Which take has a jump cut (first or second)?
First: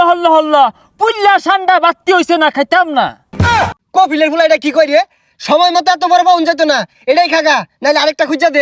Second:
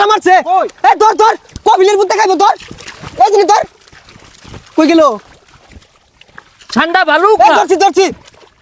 first